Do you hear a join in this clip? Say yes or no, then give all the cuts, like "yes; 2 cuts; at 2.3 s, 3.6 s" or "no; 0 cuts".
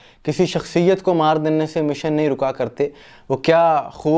no; 0 cuts